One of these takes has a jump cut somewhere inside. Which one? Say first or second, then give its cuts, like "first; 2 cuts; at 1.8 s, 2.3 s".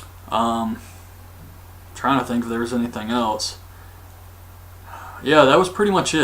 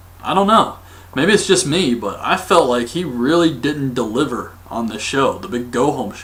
first; 1 cut; at 1.7 s